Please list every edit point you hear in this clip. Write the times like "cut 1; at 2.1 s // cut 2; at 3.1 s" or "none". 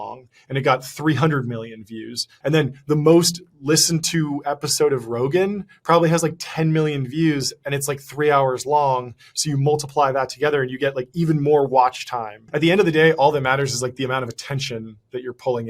cut 1; at 2.3 s // cut 2; at 12.5 s

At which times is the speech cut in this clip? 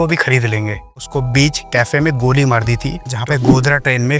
cut 1; at 0.9 s // cut 2; at 3.1 s

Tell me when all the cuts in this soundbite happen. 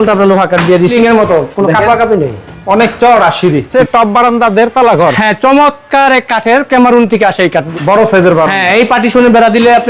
cut 1; at 0.9 s // cut 2; at 3.7 s // cut 3; at 7.7 s

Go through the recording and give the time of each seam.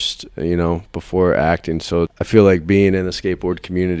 cut 1; at 2.2 s

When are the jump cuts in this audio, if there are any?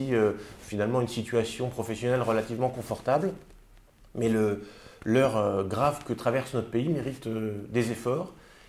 none

